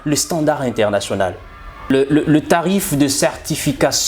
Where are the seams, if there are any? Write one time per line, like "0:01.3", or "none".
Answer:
0:01.9